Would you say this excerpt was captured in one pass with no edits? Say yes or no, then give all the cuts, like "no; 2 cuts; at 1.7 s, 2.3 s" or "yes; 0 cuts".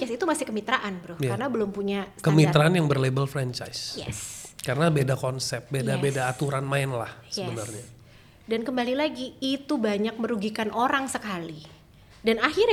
yes; 0 cuts